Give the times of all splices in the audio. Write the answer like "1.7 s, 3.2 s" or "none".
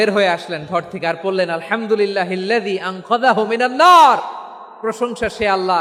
none